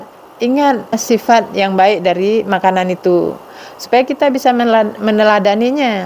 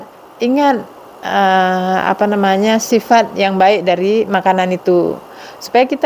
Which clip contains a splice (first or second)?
first